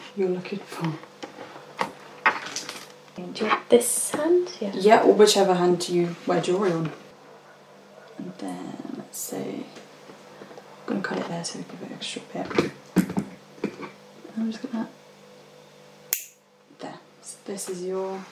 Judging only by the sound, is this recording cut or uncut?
cut